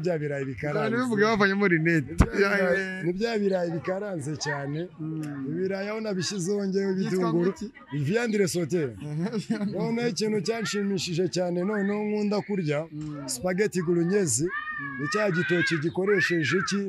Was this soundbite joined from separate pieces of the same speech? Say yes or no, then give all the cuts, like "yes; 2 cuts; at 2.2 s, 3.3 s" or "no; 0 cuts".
no; 0 cuts